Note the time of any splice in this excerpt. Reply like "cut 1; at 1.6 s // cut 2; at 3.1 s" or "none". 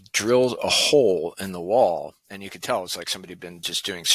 none